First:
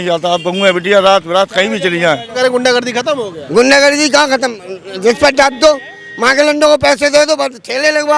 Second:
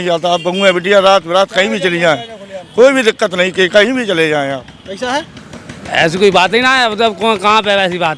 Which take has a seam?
first; 1 cut; at 2.3 s

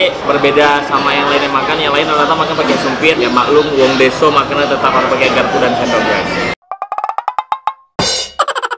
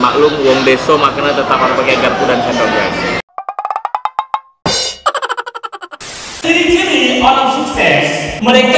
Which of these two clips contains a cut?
second; 1 cut; at 6.4 s

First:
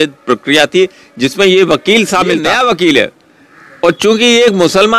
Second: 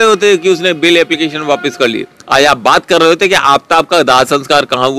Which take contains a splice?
first; 1 cut; at 2.5 s

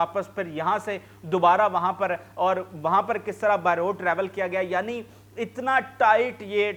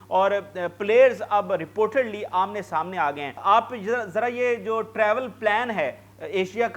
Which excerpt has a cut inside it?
second; 1 cut; at 3.4 s

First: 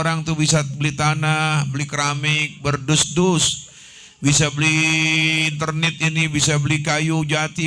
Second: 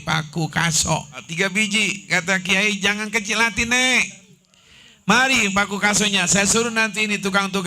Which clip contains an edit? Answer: second; 1 cut; at 1.2 s

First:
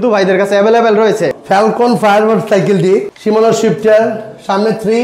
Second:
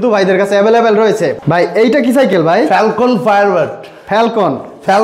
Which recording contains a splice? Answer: first; 2 cuts; at 1.4 s, 3.1 s

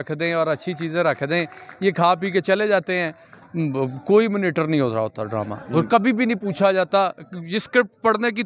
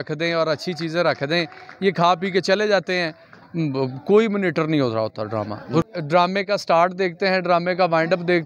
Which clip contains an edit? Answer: second; 1 cut; at 5.9 s

